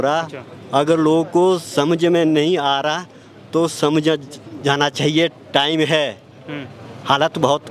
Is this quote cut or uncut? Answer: uncut